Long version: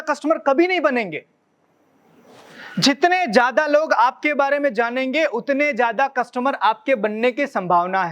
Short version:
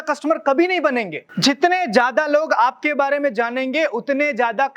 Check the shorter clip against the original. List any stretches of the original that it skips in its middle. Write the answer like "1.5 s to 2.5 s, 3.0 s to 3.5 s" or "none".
1.2 s to 2.6 s